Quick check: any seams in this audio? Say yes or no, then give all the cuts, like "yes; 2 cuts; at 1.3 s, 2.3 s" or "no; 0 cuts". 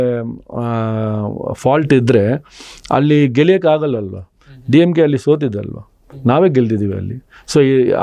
no; 0 cuts